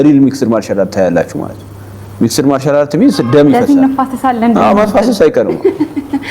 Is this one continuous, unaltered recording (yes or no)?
no